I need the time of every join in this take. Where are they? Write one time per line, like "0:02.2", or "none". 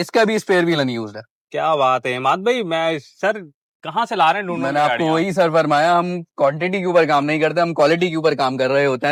none